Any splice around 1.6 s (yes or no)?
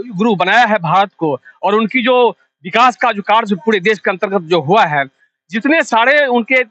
no